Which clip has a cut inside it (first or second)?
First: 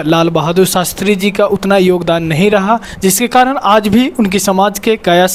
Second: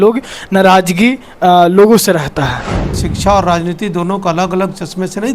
second